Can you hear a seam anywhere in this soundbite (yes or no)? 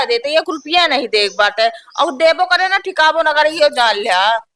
no